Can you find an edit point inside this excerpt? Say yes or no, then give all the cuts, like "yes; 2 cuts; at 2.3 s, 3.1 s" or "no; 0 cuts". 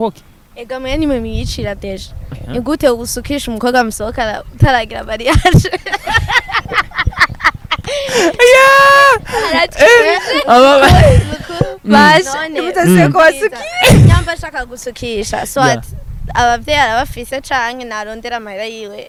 no; 0 cuts